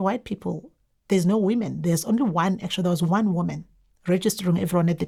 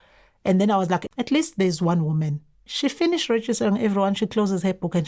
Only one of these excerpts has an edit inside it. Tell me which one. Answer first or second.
second